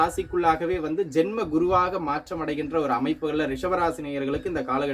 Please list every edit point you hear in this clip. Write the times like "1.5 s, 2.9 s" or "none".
none

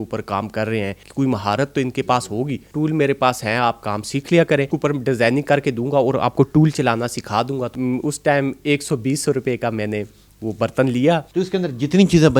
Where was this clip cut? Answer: 1.0 s, 2.6 s, 4.7 s, 7.7 s, 11.3 s

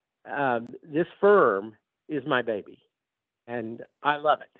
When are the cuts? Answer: 3.5 s

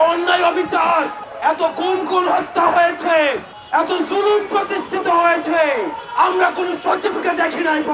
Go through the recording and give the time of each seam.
1.2 s, 3.5 s, 6.0 s

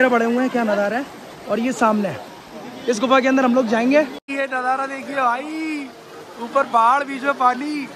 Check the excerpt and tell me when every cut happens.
4.2 s

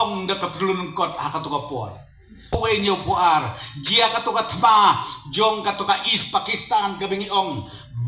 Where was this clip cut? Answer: 2.6 s

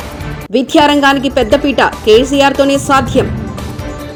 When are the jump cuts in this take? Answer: none

